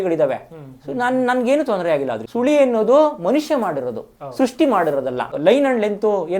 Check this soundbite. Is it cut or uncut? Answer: cut